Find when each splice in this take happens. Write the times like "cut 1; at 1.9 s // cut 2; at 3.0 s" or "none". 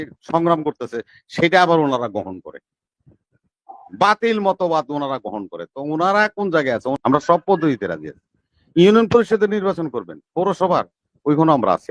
cut 1; at 6.9 s